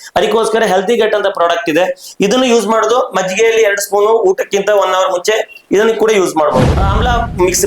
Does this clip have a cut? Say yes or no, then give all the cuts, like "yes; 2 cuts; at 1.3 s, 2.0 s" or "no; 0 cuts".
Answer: yes; 1 cut; at 6.6 s